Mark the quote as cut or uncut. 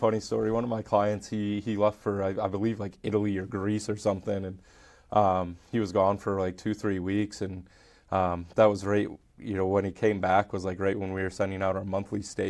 uncut